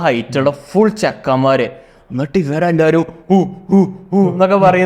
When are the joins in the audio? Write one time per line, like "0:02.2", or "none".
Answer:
none

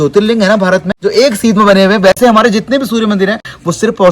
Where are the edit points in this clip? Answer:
0:00.9

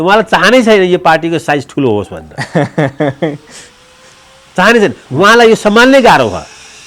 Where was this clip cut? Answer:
none

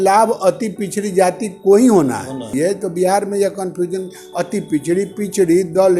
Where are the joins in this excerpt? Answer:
0:02.5

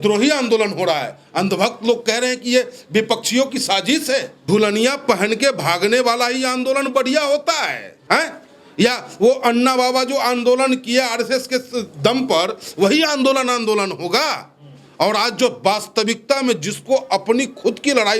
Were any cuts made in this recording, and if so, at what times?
0:04.3
0:07.9

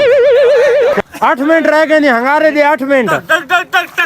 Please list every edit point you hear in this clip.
0:00.9

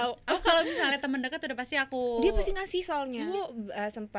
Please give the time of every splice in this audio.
0:03.2

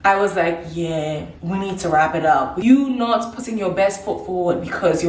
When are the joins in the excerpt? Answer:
0:01.3
0:02.6

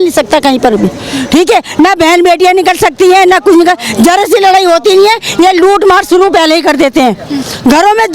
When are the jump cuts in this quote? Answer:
none

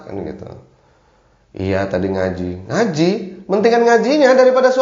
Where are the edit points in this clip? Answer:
none

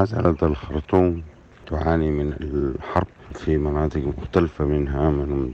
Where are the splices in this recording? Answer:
0:01.6
0:03.2

